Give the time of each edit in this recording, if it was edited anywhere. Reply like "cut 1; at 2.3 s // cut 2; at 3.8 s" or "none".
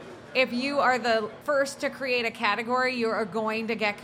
cut 1; at 1.4 s